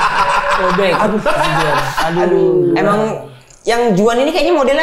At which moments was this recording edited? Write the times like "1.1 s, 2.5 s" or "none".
none

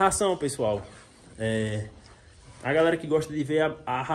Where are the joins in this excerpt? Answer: none

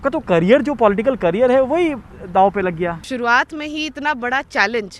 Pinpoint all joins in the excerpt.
3.0 s

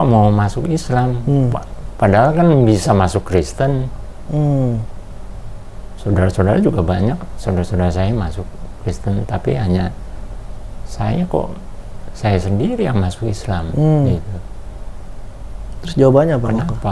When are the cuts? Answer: none

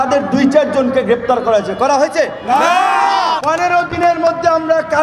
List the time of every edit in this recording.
3.4 s

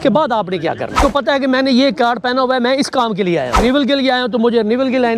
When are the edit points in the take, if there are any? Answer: 1.0 s, 3.6 s

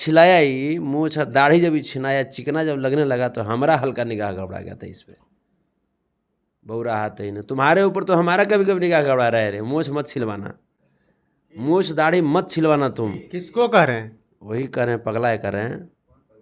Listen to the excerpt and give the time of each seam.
none

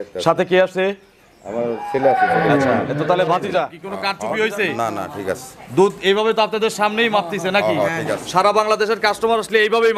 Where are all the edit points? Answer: 3.8 s

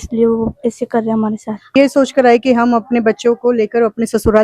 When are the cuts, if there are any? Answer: 1.7 s

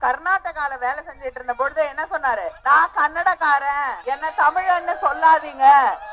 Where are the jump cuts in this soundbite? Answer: 2.5 s, 4.0 s

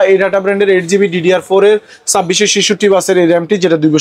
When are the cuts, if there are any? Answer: none

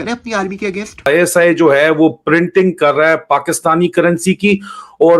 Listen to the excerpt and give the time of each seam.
1.1 s

